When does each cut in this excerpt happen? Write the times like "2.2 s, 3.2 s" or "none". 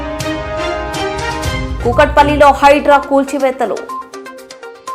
1.7 s